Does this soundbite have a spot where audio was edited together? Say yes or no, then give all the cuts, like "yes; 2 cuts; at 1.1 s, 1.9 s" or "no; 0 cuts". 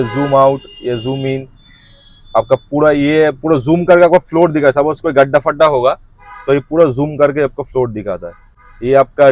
no; 0 cuts